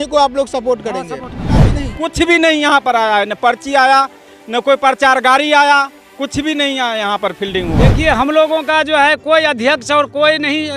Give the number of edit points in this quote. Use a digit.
2